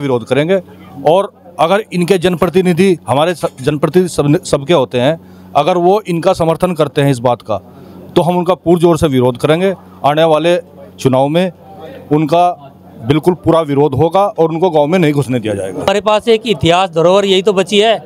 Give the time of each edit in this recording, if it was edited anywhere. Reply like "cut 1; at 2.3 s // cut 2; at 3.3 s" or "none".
cut 1; at 15.9 s